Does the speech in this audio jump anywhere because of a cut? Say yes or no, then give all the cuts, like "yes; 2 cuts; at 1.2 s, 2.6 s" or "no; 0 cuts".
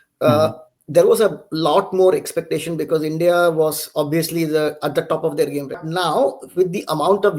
yes; 1 cut; at 5.8 s